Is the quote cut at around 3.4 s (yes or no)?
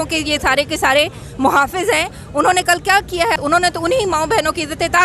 yes